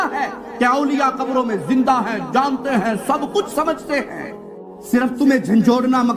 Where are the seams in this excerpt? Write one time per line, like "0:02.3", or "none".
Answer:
0:05.0